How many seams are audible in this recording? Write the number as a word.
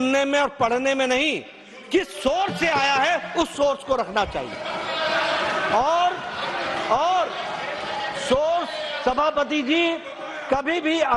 zero